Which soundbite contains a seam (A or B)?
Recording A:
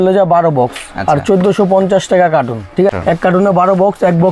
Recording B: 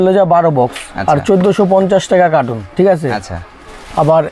A